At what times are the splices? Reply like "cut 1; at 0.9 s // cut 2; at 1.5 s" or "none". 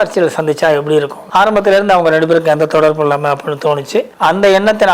cut 1; at 1.2 s // cut 2; at 4.1 s

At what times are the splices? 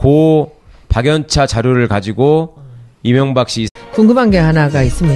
none

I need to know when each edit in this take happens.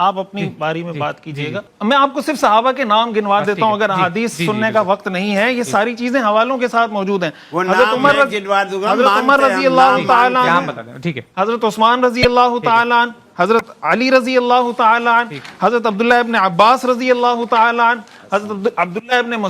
cut 1; at 1.7 s

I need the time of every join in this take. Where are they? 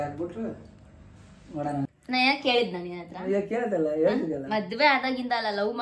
cut 1; at 1.9 s

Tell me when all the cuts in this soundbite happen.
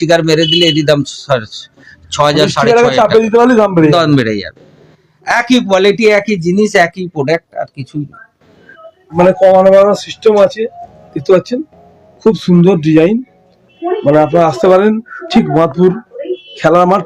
cut 1; at 9.2 s

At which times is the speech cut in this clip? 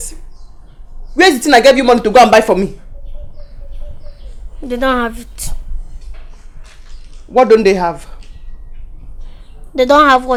none

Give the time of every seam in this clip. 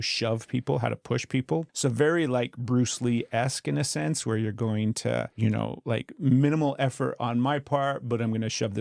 cut 1; at 1.7 s // cut 2; at 5.3 s

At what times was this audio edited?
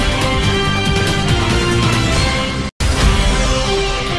cut 1; at 2.8 s

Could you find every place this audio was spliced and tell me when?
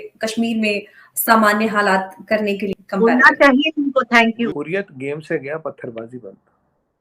cut 1; at 4.5 s

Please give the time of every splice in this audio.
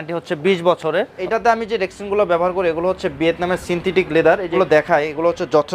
cut 1; at 1.2 s // cut 2; at 4.6 s

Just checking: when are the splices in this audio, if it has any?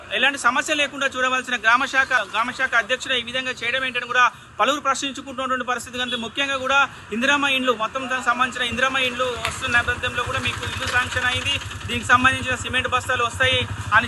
cut 1; at 2.2 s

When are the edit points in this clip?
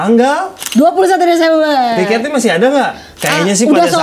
none

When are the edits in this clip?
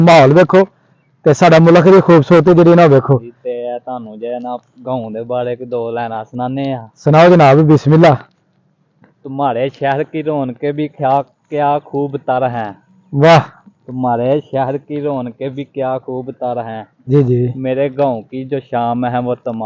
none

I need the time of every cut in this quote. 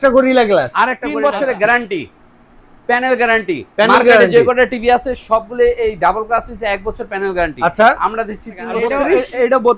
cut 1; at 1.0 s // cut 2; at 8.8 s

